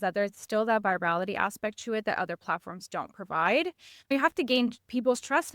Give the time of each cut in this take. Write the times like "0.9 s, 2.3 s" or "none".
4.1 s